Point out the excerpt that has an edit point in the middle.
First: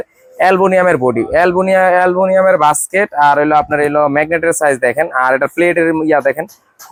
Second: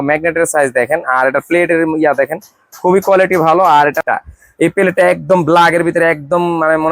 second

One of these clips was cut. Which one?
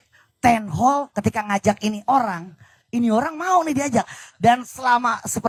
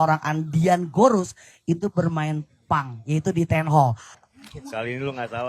second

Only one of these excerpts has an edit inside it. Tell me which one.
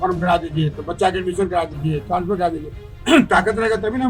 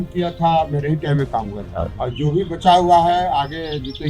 second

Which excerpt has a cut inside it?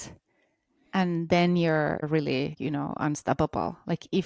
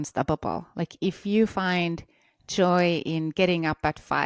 first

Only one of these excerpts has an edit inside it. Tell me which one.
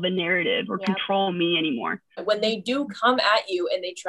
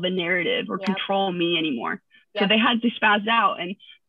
first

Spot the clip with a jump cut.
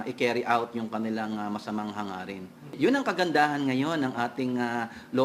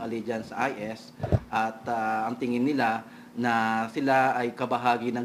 first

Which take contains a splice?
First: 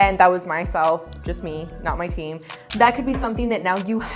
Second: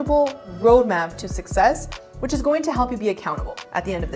first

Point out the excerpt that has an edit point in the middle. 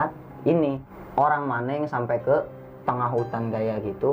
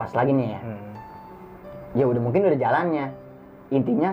first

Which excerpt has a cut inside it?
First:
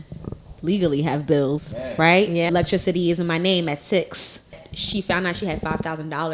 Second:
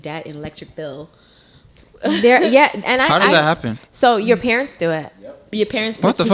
first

